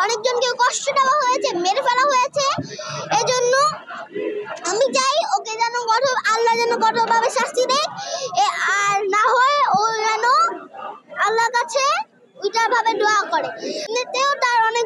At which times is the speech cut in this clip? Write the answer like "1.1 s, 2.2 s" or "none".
13.9 s